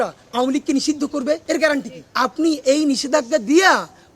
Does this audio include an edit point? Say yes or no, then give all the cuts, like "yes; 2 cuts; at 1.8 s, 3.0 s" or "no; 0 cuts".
yes; 2 cuts; at 1.4 s, 2.0 s